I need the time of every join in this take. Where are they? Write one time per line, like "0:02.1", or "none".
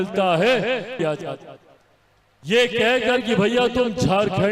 0:00.9